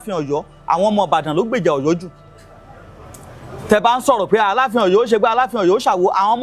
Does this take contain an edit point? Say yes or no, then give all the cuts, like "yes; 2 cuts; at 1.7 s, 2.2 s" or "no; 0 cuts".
no; 0 cuts